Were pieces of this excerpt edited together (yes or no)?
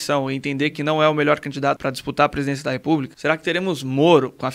yes